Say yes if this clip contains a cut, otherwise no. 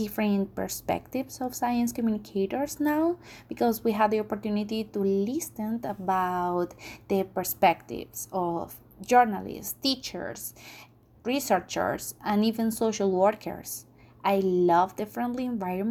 no